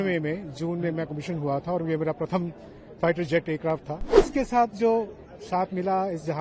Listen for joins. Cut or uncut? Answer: cut